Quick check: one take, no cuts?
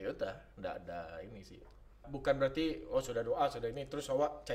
no; 1 cut; at 2.1 s

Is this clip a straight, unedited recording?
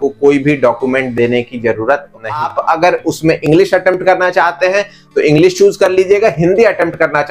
no; 1 cut; at 2.5 s

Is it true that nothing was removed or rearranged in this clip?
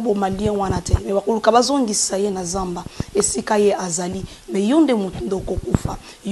yes; 0 cuts

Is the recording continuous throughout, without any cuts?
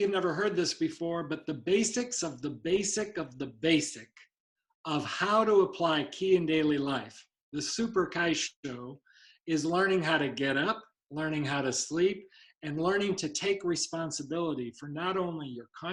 yes; 0 cuts

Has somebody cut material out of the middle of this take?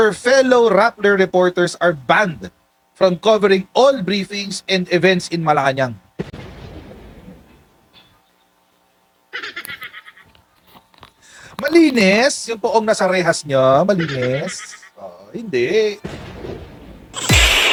no; 0 cuts

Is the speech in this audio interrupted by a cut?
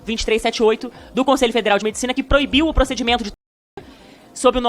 no; 0 cuts

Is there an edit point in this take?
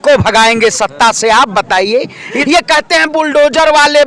yes; 1 cut; at 2.3 s

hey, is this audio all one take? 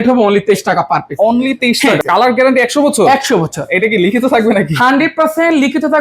no; 1 cut; at 2.0 s

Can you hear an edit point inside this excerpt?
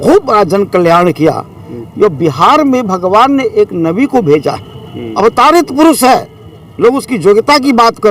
no; 0 cuts

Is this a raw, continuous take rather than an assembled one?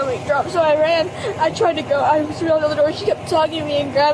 yes; 0 cuts

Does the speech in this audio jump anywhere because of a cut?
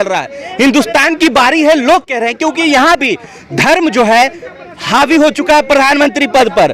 no; 0 cuts

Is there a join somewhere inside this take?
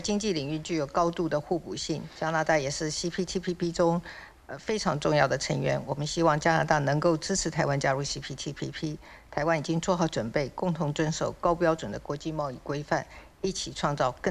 no; 0 cuts

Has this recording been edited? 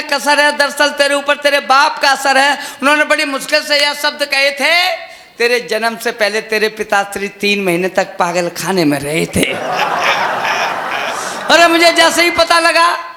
no; 0 cuts

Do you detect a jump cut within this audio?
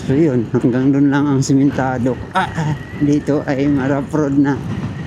no; 0 cuts

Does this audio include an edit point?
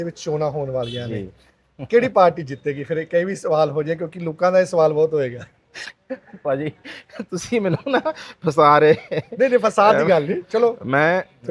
no; 0 cuts

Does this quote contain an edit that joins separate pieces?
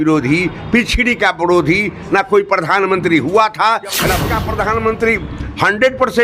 yes; 1 cut; at 4.3 s

